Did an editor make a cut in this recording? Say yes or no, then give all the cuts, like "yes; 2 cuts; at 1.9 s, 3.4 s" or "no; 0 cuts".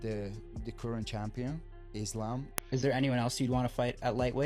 yes; 1 cut; at 2.6 s